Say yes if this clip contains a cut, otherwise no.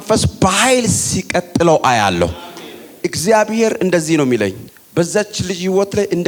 no